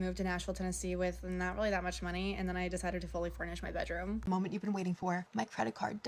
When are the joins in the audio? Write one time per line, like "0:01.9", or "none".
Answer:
0:04.2